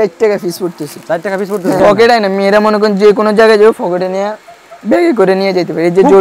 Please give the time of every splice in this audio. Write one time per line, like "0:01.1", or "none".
0:01.8

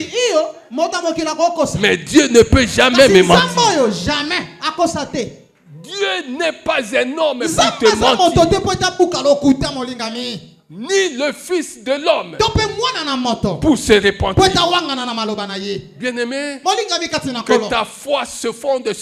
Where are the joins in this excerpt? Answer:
none

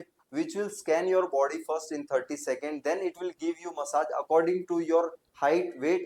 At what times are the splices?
none

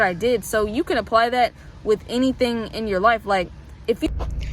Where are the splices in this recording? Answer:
none

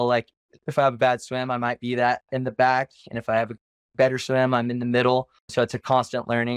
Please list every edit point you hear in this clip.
0:05.4

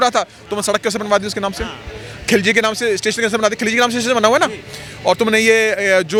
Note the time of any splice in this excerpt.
none

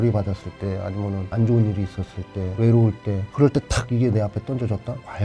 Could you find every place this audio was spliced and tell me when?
none

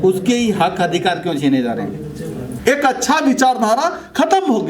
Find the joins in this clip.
0:02.5

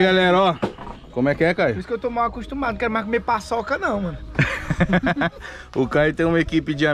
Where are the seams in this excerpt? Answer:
none

